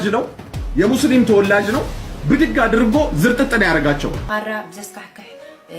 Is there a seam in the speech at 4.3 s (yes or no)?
yes